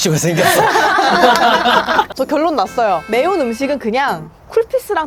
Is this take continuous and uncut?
no; 2 cuts; at 2.1 s, 3.0 s

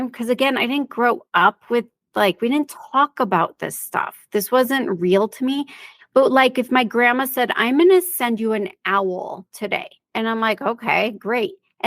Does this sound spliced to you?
yes; 1 cut; at 10.0 s

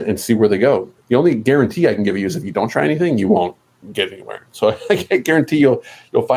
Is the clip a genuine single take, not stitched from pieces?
no; 1 cut; at 1.0 s

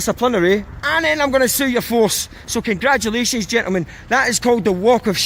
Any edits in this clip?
no; 0 cuts

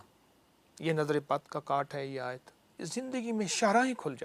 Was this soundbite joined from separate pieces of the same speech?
yes; 1 cut; at 2.8 s

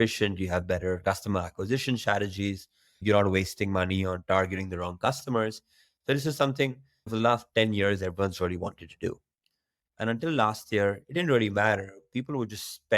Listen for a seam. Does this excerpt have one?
no; 0 cuts

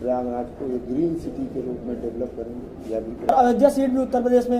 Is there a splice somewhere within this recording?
yes; 1 cut; at 3.3 s

